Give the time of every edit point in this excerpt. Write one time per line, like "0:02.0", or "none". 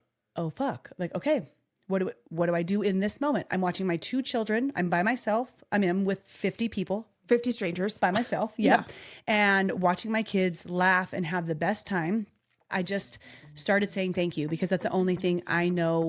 0:12.7